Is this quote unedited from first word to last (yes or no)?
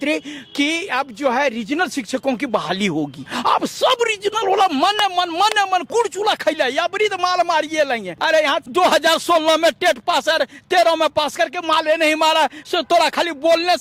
no